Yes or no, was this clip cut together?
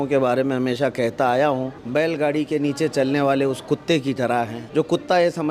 yes